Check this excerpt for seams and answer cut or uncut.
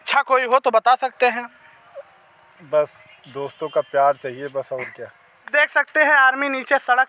cut